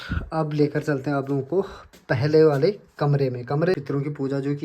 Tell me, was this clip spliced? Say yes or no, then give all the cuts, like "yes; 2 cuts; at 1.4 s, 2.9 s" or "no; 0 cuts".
yes; 1 cut; at 3.7 s